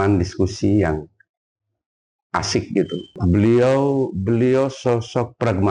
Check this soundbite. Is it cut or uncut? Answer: cut